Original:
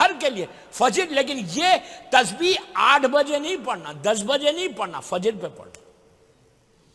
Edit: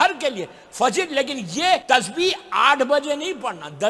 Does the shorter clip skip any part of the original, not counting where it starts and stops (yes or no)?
yes